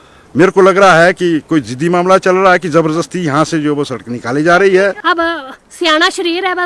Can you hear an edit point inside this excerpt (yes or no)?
yes